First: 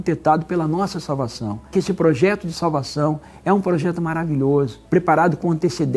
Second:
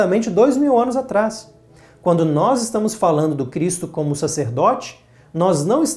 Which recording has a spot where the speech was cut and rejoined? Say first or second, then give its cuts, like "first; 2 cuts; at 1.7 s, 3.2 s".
first; 2 cuts; at 1.7 s, 4.8 s